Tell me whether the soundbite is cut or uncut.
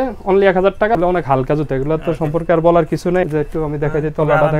cut